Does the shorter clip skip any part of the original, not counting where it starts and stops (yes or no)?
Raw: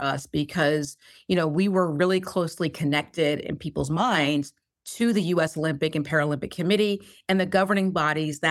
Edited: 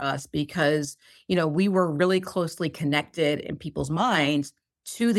no